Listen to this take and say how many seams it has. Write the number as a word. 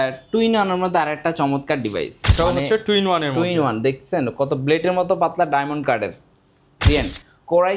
two